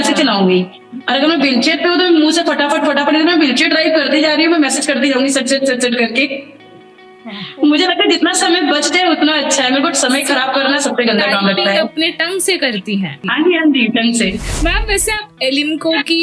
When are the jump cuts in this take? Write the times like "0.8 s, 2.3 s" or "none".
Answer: 13.2 s, 14.5 s